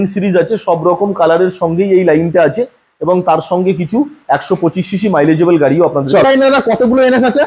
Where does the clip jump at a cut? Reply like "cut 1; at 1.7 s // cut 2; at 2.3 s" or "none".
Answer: cut 1; at 6.2 s